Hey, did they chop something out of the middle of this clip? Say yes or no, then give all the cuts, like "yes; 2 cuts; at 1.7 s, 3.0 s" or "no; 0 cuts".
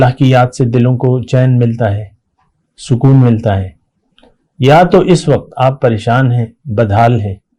no; 0 cuts